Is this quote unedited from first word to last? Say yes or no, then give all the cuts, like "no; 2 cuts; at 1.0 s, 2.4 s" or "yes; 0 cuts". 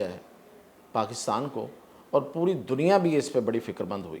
yes; 0 cuts